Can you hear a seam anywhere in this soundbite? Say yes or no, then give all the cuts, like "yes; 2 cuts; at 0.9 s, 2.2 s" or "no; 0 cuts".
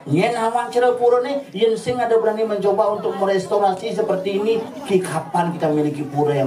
no; 0 cuts